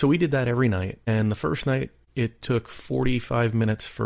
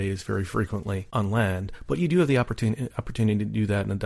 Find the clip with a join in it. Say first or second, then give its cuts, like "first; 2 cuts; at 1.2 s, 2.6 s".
first; 2 cuts; at 1.0 s, 2.0 s